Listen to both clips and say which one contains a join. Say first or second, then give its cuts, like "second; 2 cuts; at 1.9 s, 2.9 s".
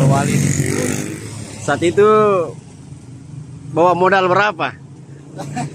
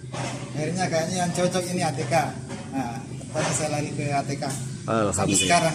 first; 1 cut; at 1.1 s